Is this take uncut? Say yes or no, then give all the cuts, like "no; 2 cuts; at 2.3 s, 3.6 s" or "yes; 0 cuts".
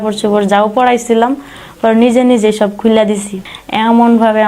no; 1 cut; at 3.5 s